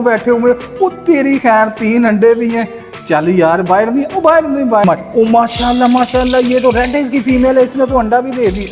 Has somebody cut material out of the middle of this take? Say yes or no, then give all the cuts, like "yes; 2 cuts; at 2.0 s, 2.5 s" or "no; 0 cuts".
yes; 1 cut; at 4.8 s